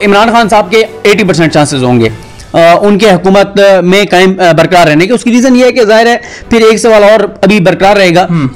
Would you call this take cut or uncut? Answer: uncut